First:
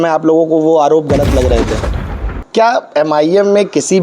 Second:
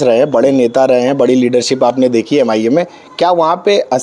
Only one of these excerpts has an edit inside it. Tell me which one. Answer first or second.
first